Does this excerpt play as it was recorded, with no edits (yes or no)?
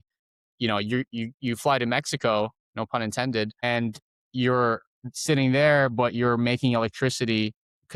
yes